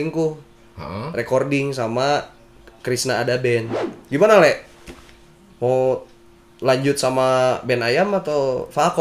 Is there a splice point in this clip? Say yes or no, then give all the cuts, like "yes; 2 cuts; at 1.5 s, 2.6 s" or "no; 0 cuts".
yes; 1 cut; at 3.8 s